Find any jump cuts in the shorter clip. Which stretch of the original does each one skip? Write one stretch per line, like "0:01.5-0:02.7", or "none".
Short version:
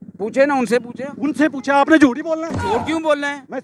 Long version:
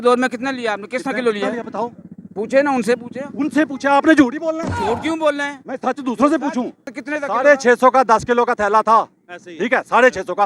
none